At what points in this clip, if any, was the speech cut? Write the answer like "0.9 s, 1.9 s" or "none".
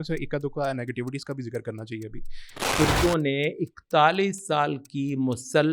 2.7 s